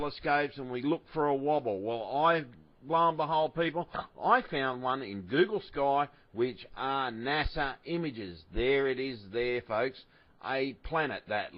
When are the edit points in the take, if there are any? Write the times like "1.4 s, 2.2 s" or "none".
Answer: 10.0 s